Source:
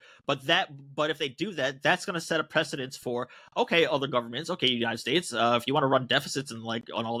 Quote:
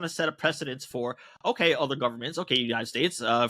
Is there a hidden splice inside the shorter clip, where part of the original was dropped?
no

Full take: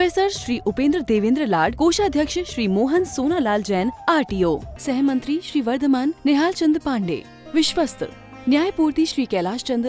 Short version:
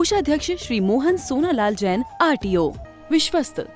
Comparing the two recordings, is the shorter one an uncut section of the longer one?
no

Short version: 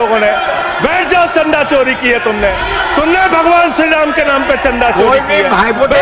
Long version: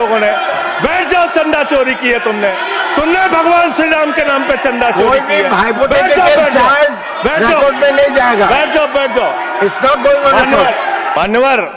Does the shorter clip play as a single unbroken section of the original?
yes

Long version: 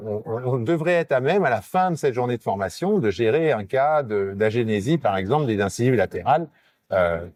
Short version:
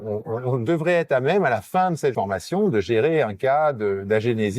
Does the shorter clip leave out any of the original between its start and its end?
yes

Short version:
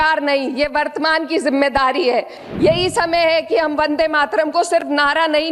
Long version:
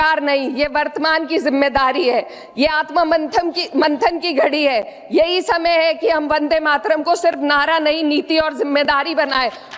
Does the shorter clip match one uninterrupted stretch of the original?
no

